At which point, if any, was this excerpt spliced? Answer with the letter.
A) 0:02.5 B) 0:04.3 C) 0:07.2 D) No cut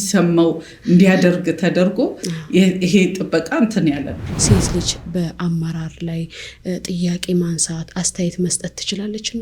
B